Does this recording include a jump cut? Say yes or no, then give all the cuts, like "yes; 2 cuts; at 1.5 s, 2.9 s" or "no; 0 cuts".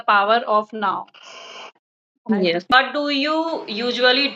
yes; 1 cut; at 2.8 s